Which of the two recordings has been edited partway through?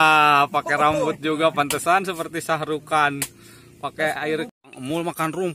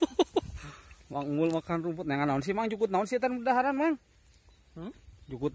first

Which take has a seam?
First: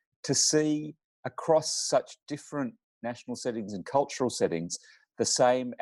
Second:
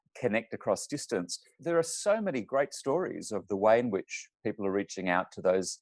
second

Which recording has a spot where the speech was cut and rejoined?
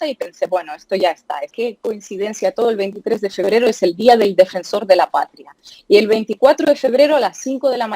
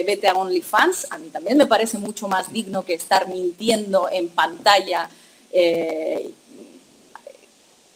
first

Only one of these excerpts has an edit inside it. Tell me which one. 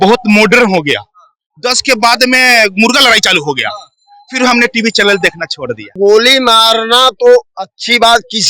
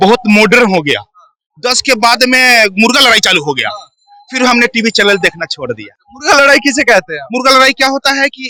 first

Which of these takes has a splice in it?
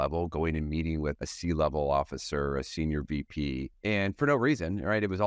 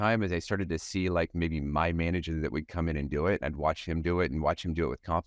first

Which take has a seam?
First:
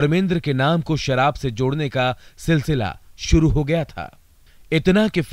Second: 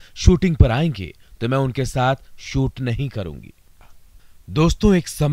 second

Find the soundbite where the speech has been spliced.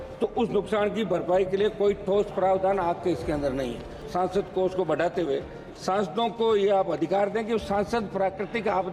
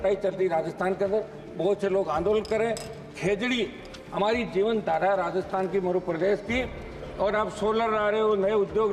first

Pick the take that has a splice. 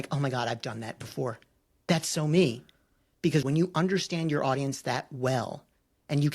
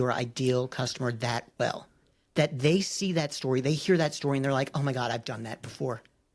first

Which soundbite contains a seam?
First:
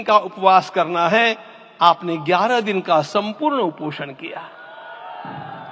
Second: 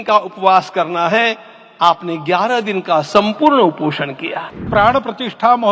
second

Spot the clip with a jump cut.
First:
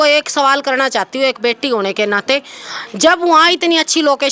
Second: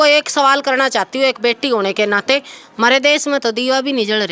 second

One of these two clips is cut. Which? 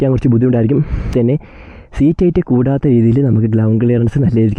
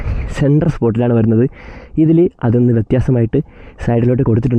first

